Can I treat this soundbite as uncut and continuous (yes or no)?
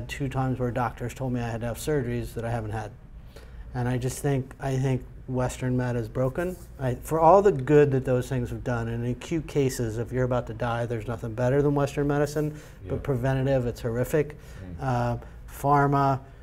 yes